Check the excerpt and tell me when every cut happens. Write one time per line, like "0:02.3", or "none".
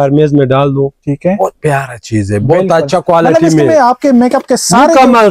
none